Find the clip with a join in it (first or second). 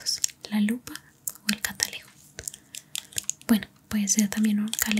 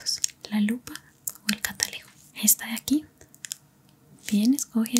second